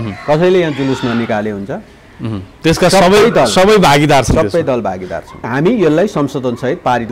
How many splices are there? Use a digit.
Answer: 1